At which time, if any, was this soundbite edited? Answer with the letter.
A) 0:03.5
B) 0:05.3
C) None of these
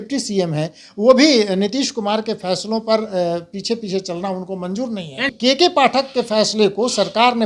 B